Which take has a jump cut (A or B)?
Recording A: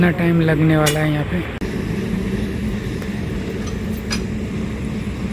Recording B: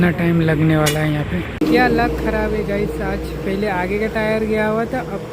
B